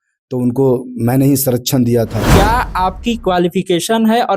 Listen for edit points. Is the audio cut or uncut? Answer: cut